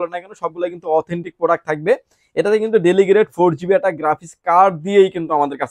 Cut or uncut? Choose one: uncut